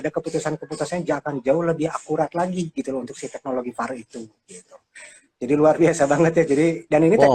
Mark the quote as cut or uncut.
uncut